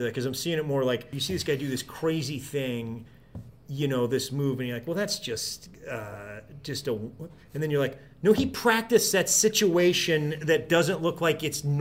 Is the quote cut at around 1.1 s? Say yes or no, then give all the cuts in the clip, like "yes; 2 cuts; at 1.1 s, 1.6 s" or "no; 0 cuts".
yes; 1 cut; at 1.1 s